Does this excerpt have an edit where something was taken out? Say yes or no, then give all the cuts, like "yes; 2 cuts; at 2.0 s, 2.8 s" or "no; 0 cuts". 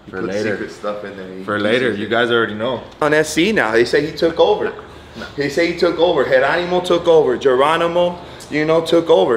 yes; 1 cut; at 3.0 s